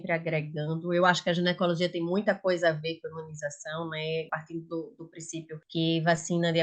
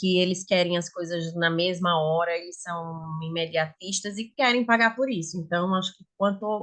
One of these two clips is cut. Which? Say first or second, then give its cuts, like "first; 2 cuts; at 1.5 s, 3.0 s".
first; 2 cuts; at 4.3 s, 5.6 s